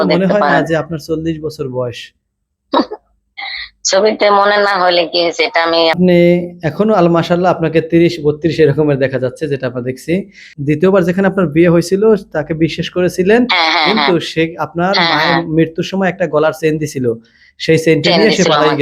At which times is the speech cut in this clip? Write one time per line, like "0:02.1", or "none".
0:06.0
0:10.5